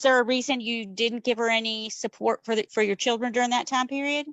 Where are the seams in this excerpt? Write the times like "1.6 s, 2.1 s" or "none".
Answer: none